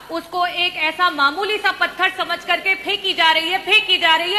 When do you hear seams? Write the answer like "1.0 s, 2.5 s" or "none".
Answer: none

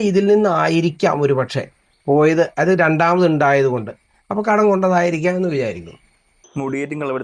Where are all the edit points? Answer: none

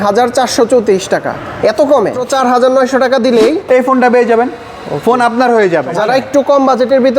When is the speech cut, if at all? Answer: 2.3 s, 3.6 s, 5.9 s

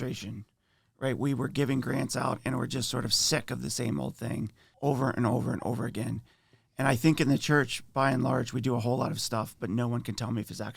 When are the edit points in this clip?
4.6 s

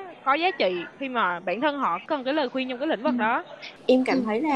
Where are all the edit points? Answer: 2.1 s, 3.7 s

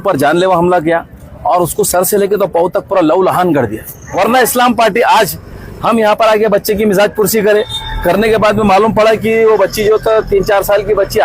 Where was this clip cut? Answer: 4.1 s

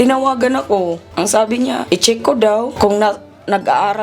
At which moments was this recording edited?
1.0 s, 1.8 s, 2.7 s

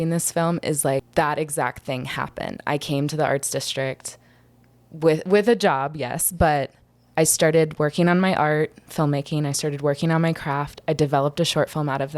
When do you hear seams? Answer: 1.1 s

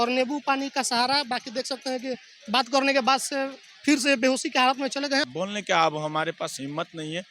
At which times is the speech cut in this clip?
5.3 s

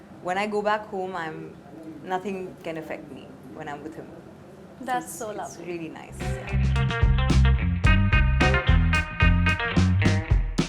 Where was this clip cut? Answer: 6.4 s

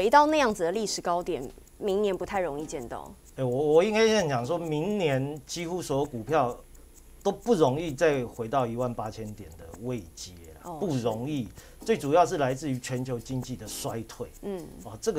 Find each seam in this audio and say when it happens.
none

